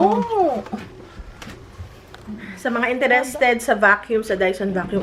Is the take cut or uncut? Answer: cut